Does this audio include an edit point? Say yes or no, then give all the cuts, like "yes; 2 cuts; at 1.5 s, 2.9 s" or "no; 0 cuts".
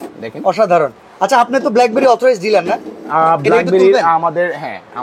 no; 0 cuts